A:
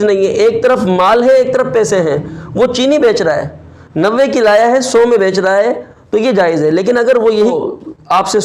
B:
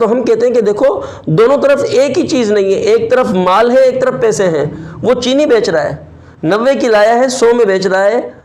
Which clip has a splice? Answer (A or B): A